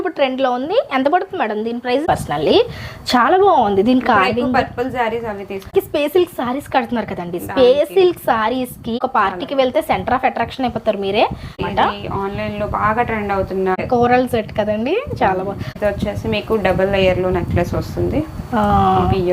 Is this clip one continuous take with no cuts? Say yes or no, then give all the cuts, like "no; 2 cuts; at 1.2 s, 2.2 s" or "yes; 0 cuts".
no; 6 cuts; at 2.0 s, 5.7 s, 9.0 s, 11.6 s, 13.8 s, 15.7 s